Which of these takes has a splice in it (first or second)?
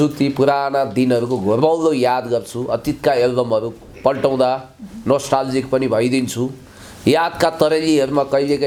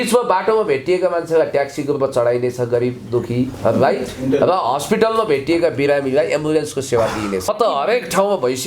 second